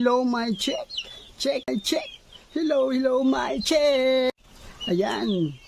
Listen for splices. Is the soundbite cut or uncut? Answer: uncut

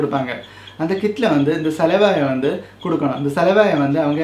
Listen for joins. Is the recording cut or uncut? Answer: uncut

